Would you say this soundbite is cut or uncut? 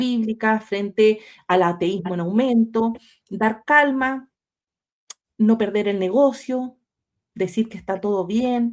uncut